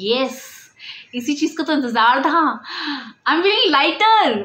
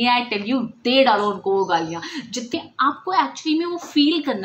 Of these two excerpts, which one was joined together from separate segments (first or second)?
second